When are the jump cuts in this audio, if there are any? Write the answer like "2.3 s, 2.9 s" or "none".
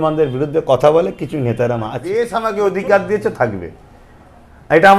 2.0 s